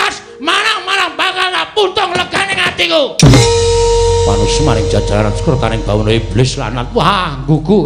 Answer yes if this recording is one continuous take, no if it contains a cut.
yes